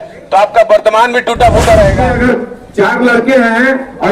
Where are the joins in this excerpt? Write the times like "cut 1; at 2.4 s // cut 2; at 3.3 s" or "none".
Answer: cut 1; at 2.1 s